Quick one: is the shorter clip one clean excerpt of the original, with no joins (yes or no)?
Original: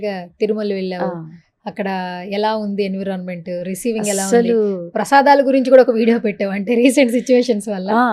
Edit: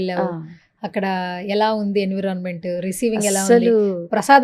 yes